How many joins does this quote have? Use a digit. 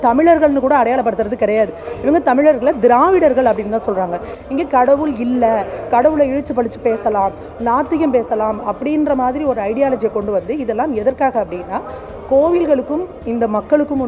0